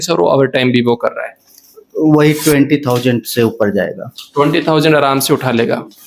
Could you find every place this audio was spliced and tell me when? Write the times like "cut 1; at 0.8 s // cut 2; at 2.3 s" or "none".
none